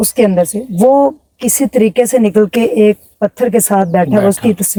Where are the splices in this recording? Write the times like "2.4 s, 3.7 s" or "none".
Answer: none